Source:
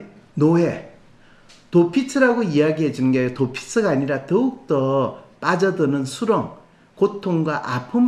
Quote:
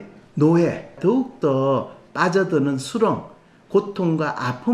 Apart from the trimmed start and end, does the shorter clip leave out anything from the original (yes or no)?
yes